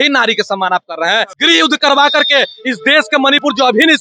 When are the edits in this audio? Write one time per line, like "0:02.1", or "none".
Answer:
0:01.3